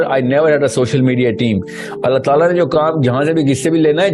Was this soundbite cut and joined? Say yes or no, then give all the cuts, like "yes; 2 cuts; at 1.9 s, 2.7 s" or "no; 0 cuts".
no; 0 cuts